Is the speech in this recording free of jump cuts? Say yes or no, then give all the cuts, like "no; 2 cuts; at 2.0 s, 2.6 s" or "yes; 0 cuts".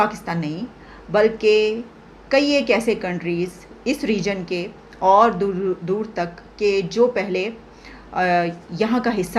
yes; 0 cuts